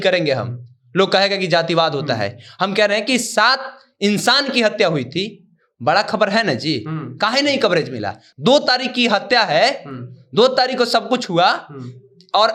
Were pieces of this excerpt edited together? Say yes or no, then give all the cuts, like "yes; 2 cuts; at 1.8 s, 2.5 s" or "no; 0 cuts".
no; 0 cuts